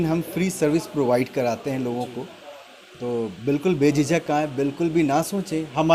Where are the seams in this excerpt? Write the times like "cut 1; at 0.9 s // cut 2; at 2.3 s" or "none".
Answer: none